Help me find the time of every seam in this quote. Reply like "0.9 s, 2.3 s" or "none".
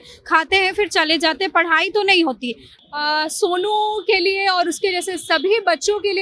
2.6 s